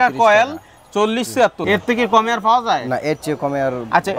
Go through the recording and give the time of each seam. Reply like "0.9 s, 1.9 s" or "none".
1.6 s